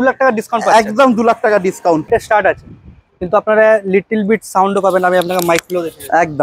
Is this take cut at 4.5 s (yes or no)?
no